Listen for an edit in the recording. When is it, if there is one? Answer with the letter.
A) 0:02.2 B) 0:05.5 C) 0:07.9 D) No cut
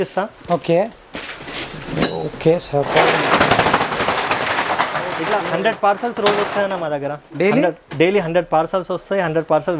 D